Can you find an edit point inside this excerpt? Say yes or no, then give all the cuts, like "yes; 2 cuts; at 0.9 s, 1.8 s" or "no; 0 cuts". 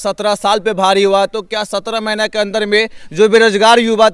no; 0 cuts